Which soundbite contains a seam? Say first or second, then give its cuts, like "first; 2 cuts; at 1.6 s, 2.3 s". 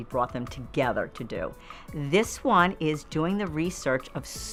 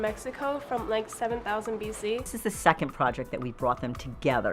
second; 1 cut; at 2.3 s